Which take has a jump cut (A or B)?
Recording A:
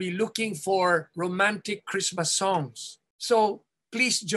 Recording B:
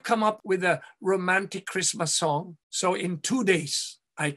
B